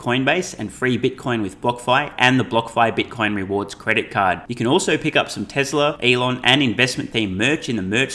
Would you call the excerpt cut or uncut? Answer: cut